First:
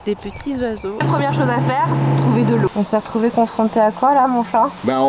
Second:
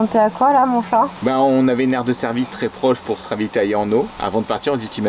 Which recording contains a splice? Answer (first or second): first